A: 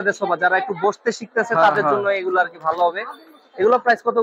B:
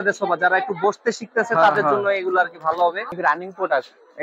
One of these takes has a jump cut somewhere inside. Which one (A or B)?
B